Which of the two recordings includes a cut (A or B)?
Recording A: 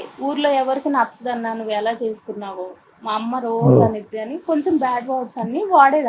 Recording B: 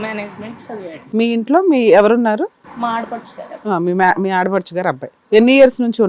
B